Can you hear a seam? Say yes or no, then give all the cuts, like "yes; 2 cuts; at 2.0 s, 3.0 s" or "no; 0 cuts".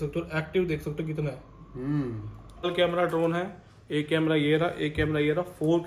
yes; 1 cut; at 2.7 s